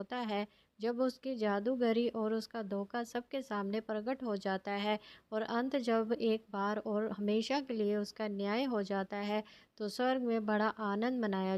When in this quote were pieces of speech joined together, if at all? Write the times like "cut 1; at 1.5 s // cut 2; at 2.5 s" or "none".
cut 1; at 7.1 s